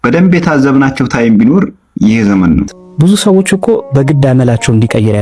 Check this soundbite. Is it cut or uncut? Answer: cut